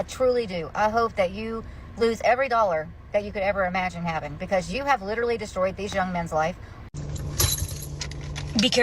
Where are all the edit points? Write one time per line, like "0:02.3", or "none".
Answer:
0:06.8